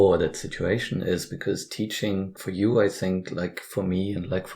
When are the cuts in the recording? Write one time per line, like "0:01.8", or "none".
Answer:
0:02.4